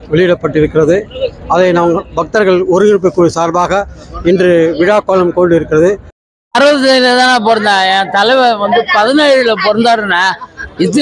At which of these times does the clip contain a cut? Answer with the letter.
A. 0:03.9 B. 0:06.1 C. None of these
B